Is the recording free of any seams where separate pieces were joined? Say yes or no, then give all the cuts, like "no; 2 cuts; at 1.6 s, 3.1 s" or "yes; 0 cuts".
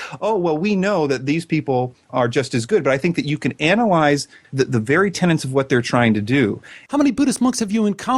no; 3 cuts; at 2.1 s, 4.4 s, 6.7 s